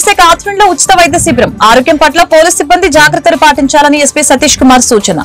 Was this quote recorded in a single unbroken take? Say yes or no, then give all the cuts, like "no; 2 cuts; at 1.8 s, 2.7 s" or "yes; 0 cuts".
yes; 0 cuts